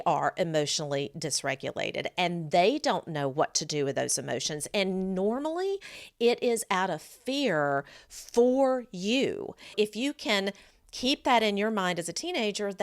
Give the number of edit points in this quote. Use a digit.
1